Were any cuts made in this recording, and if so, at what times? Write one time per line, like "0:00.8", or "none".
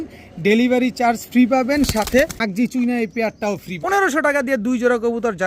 0:02.4
0:03.8